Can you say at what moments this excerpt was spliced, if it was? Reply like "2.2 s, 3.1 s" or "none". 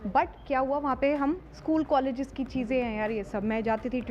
1.5 s